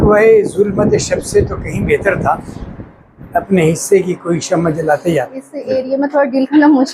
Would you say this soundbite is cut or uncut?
cut